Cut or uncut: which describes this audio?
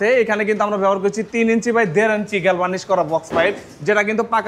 uncut